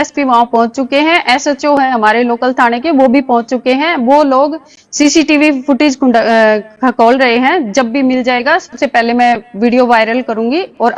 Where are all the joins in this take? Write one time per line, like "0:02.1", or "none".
none

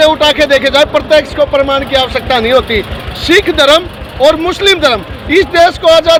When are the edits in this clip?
none

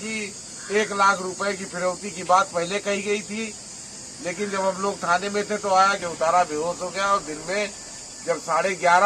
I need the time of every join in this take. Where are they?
0:06.0

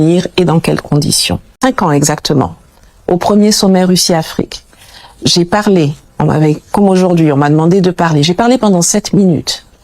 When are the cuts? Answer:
0:01.6

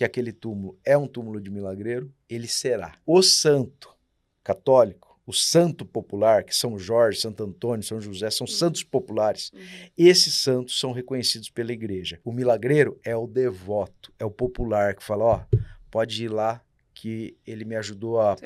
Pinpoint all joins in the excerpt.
0:02.9
0:12.1

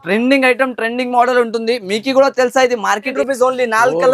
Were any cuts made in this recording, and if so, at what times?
0:03.1

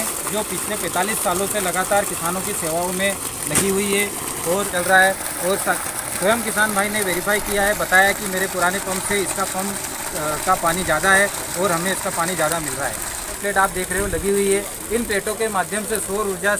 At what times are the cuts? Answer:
0:04.7
0:13.4

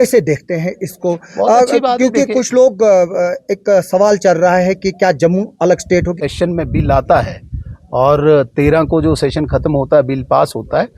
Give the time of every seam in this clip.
0:06.1

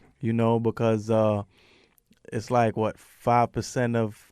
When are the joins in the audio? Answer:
0:02.1

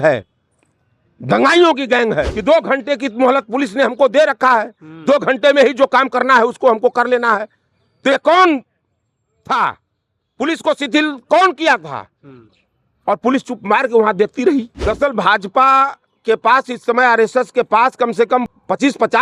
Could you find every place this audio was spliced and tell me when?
0:02.3
0:14.7
0:18.5

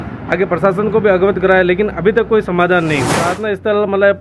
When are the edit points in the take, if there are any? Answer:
0:03.2

